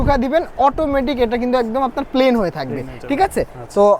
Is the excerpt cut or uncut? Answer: uncut